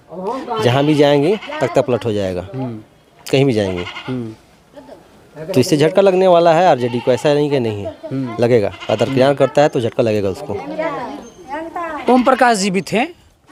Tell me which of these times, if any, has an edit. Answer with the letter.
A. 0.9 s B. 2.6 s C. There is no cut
C